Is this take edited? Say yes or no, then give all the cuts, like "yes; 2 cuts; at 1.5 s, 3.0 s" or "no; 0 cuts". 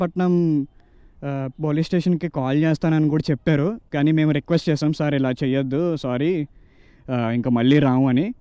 no; 0 cuts